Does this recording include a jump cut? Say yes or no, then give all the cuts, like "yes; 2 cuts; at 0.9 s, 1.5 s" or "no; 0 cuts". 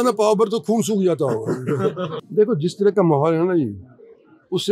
no; 0 cuts